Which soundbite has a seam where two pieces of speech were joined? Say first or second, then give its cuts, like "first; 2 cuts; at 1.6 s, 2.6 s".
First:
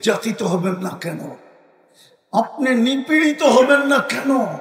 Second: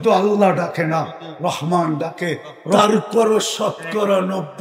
second; 1 cut; at 2.8 s